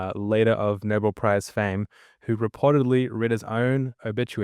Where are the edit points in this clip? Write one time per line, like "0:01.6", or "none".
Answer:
none